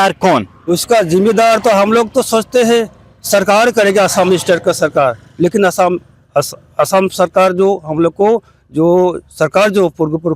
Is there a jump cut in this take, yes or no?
no